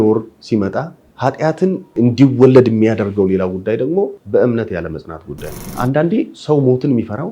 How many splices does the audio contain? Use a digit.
4